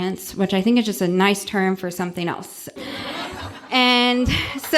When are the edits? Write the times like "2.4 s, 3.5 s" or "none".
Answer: 2.8 s

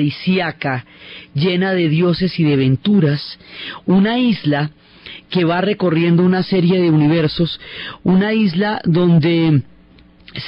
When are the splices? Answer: none

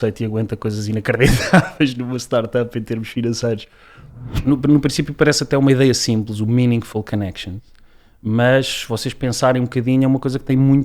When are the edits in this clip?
4.3 s

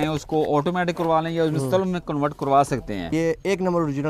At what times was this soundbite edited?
none

